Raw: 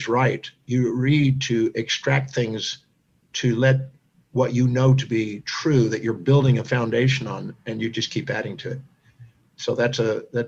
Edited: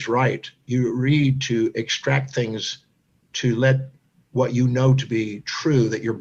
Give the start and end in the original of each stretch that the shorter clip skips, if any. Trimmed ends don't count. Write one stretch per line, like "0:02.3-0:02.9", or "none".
none